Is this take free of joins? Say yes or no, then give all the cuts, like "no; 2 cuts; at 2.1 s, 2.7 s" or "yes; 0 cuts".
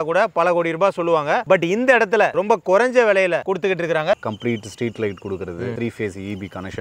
no; 2 cuts; at 4.2 s, 5.8 s